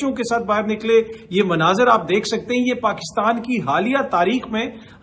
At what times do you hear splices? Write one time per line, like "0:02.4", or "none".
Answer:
none